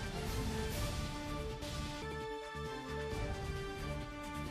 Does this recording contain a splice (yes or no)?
no